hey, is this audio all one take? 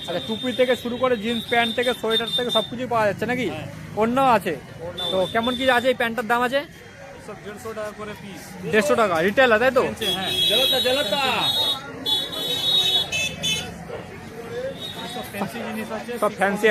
yes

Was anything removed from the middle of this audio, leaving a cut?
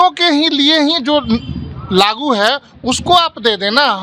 no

